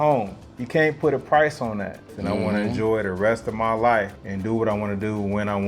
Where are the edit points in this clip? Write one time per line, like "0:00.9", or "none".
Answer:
0:02.1
0:04.2